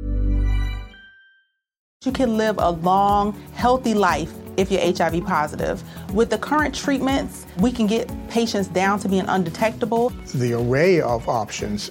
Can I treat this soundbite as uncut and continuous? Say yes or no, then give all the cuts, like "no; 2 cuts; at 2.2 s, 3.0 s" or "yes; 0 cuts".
no; 1 cut; at 1.9 s